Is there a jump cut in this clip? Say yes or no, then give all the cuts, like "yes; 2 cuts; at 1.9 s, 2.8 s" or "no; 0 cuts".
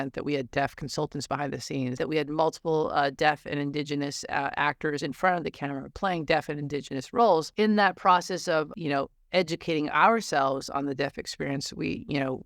yes; 3 cuts; at 2.0 s, 7.5 s, 8.7 s